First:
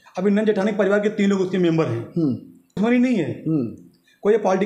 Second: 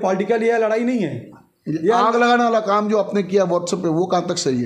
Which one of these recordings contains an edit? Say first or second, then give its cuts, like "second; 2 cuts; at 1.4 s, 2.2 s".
first; 1 cut; at 2.8 s